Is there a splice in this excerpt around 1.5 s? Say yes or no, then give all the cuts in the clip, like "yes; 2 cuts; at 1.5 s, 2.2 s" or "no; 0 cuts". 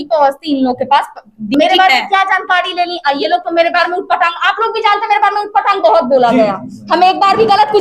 yes; 1 cut; at 1.5 s